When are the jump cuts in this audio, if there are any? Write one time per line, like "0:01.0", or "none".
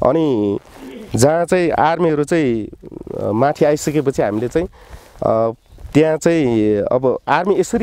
none